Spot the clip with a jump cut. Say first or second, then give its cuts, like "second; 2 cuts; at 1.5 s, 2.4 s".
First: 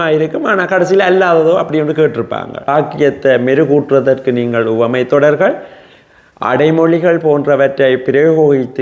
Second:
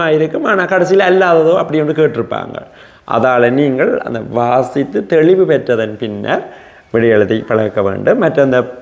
first; 1 cut; at 2.7 s